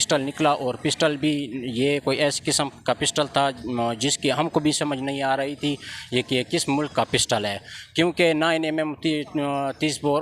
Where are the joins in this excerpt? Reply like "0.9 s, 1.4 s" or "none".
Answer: none

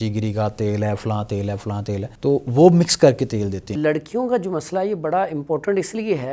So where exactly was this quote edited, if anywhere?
2.1 s, 3.7 s

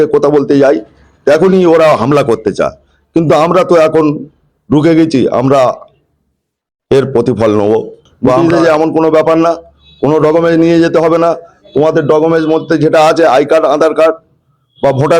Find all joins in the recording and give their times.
8.4 s

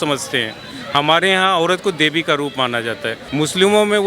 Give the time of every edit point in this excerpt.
3.2 s

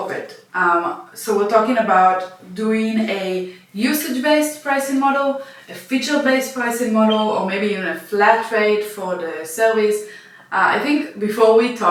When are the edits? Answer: none

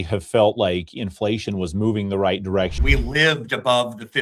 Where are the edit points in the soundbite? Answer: 2.7 s

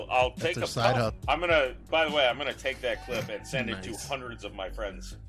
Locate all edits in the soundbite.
1.2 s

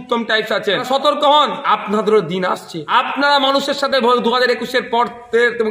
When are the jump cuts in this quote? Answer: 0.8 s, 1.6 s, 2.7 s

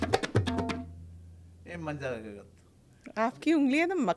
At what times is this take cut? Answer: none

